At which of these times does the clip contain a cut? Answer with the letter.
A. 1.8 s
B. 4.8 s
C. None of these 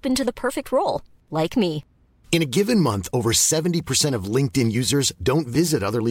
C